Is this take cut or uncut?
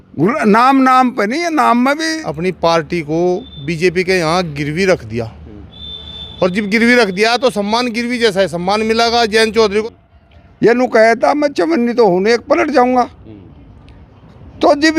cut